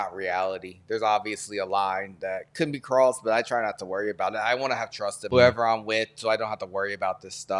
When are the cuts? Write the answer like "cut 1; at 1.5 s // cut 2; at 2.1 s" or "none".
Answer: cut 1; at 5.2 s